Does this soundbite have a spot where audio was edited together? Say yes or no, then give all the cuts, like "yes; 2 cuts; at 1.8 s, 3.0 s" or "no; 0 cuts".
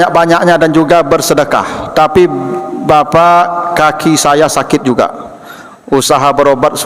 no; 0 cuts